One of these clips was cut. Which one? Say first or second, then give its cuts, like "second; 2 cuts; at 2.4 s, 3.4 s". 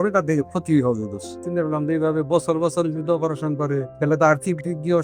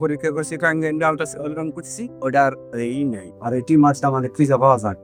first; 2 cuts; at 1.4 s, 3.9 s